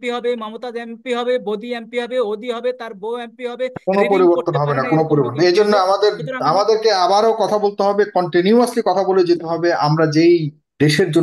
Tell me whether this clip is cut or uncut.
uncut